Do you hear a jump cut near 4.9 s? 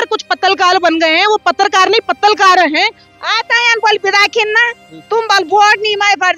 no; 1 cut; at 3.1 s

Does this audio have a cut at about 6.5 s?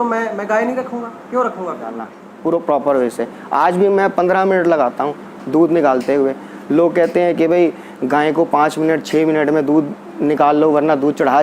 no; 1 cut; at 2.2 s

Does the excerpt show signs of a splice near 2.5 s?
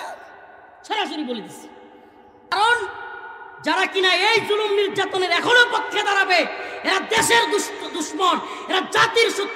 yes; 1 cut; at 2.5 s

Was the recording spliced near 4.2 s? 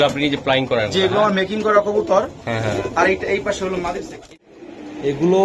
yes; 1 cut; at 4.2 s

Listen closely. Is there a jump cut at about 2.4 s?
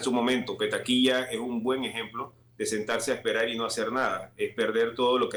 no; 0 cuts

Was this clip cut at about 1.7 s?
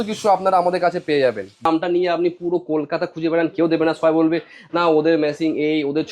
yes; 1 cut; at 1.7 s

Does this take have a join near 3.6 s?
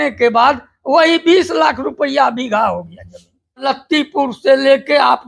yes; 1 cut; at 3.6 s

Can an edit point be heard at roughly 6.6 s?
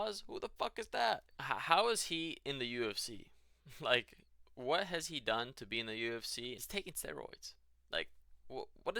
yes; 2 cuts; at 1.3 s, 6.6 s

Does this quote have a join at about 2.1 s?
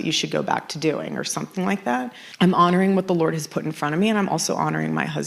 yes; 1 cut; at 2.1 s

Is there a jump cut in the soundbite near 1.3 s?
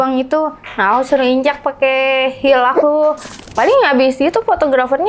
no; 1 cut; at 3.4 s

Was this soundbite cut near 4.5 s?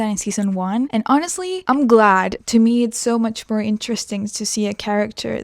no; 3 cuts; at 0.9 s, 1.6 s, 2.4 s

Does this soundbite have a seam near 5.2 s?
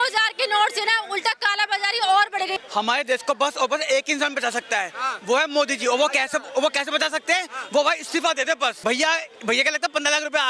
no; 2 cuts; at 2.6 s, 8.8 s

